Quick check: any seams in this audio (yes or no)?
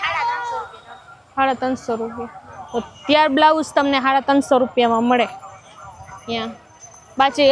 no